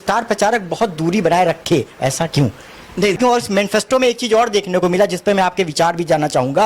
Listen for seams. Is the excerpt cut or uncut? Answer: cut